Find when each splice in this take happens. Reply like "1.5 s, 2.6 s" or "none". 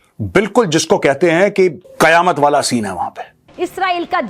1.8 s, 3.5 s